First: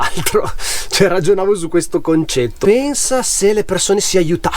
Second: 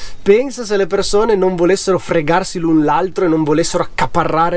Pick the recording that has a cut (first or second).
first